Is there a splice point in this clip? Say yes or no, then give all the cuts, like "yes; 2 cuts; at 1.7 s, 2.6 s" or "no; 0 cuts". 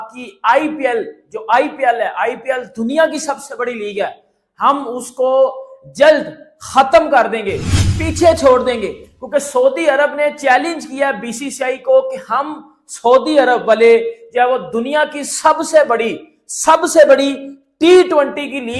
no; 0 cuts